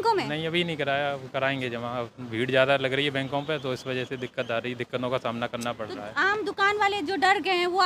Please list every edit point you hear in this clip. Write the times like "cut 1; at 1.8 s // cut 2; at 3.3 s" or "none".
none